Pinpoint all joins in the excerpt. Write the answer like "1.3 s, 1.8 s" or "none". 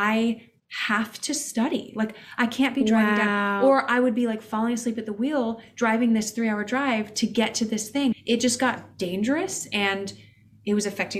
none